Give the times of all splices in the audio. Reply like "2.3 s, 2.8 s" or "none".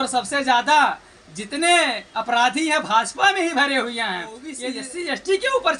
4.6 s